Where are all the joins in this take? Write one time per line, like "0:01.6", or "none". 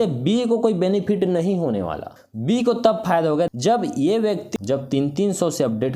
0:02.1
0:03.5
0:04.5